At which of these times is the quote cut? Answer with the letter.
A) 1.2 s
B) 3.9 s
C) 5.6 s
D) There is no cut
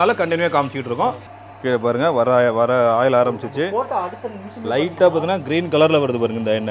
A